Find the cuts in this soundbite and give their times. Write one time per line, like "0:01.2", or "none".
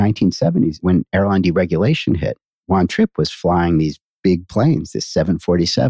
0:00.8
0:02.5